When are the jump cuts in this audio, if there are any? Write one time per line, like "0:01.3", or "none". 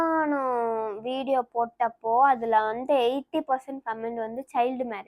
none